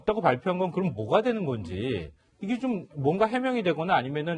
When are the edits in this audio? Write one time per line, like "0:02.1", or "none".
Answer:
none